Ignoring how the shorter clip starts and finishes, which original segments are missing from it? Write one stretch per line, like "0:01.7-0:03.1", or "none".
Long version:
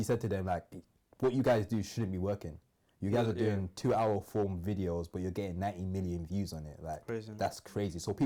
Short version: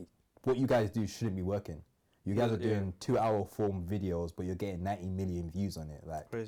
none